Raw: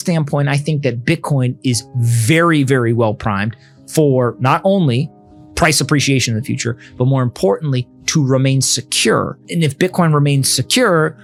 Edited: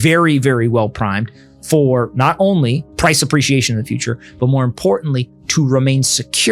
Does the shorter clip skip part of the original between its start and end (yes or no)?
yes